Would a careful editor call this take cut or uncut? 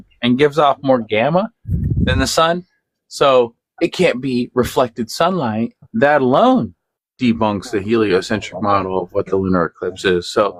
uncut